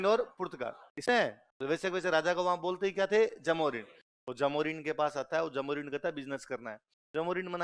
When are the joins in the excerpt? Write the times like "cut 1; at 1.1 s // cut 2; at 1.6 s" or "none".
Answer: cut 1; at 1.0 s